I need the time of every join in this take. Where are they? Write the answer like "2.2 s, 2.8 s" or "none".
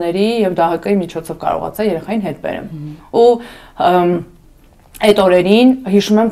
none